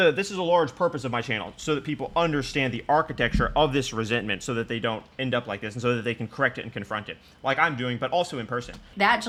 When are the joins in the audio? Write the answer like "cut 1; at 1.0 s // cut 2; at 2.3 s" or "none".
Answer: none